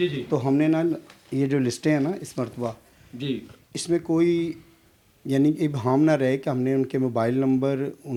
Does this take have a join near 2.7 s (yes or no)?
no